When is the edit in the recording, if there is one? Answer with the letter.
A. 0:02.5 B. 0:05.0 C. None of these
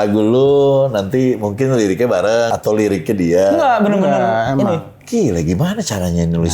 A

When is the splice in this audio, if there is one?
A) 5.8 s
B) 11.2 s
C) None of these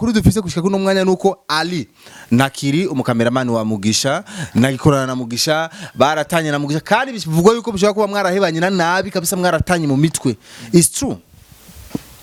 C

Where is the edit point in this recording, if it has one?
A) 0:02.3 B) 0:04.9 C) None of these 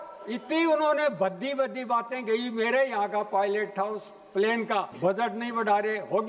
B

